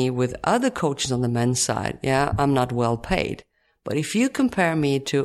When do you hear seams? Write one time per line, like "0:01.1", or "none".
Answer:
none